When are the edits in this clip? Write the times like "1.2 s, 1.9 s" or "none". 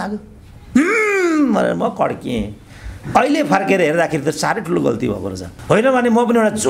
5.5 s